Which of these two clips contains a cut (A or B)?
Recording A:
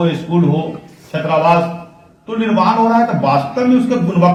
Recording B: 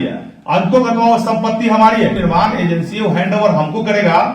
B